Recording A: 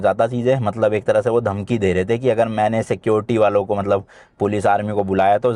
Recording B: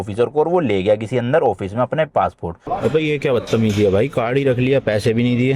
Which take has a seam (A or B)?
B